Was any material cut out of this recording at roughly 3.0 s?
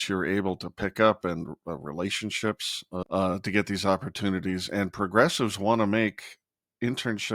yes; 1 cut; at 3.0 s

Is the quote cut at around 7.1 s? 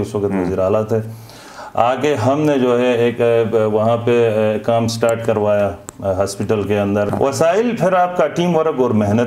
yes; 1 cut; at 7.1 s

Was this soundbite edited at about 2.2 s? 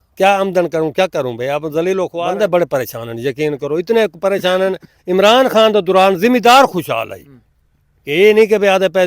yes; 1 cut; at 2.2 s

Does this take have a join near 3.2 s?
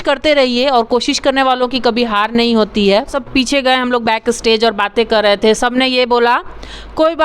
yes; 1 cut; at 3.2 s

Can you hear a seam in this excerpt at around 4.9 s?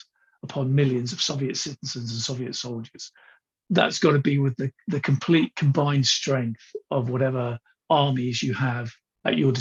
no; 0 cuts

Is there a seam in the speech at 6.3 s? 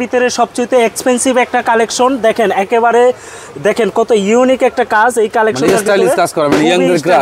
no; 0 cuts

